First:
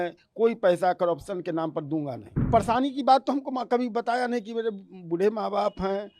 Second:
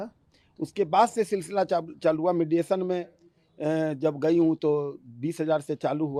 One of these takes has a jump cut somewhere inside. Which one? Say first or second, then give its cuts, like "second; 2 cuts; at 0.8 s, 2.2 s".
first; 1 cut; at 2.3 s